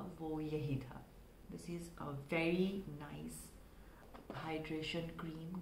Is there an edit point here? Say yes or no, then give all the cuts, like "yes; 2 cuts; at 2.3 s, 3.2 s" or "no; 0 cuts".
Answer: yes; 2 cuts; at 1.4 s, 4.1 s